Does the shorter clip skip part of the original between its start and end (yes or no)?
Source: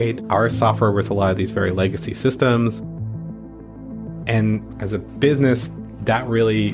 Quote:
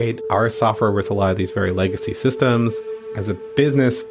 yes